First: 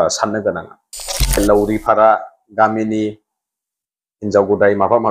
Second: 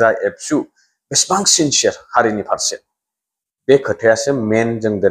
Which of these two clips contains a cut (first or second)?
first